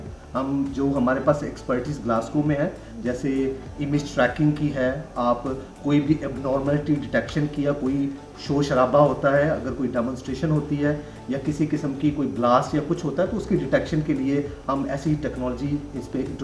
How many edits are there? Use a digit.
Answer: 0